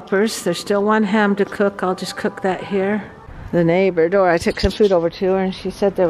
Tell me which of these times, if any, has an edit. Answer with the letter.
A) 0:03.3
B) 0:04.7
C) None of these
A